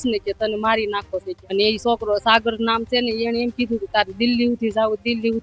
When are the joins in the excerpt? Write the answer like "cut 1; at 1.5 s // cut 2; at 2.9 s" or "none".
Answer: cut 1; at 1.3 s